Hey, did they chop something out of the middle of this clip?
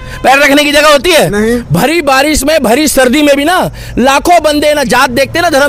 no; 0 cuts

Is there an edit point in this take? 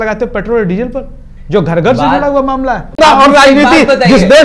yes; 1 cut; at 3.0 s

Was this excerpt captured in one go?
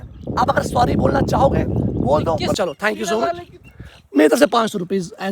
no; 1 cut; at 2.6 s

